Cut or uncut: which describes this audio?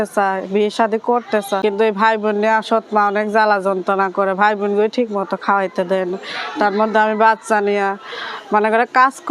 cut